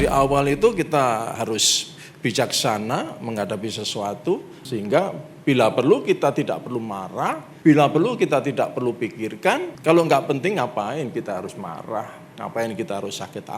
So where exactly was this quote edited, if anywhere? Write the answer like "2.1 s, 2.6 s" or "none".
1.4 s, 4.5 s, 7.5 s, 9.7 s